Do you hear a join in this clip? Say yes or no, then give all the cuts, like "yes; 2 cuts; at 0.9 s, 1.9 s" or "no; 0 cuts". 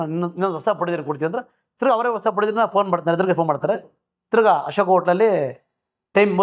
no; 0 cuts